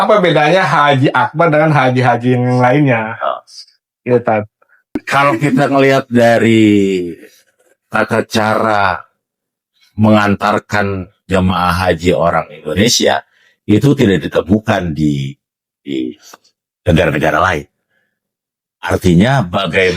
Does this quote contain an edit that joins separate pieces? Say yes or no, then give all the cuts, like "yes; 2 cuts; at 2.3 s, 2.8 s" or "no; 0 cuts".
yes; 1 cut; at 5.0 s